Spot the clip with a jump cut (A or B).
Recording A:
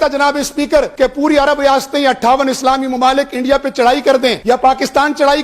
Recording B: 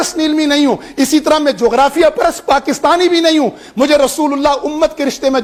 A